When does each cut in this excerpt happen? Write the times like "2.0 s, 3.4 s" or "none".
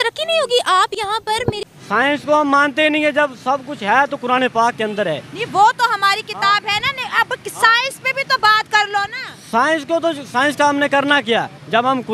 1.6 s